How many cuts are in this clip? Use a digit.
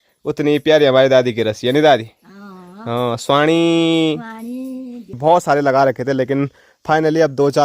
1